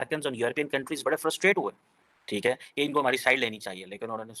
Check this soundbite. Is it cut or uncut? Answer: uncut